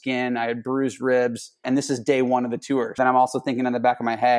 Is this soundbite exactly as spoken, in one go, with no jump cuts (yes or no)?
no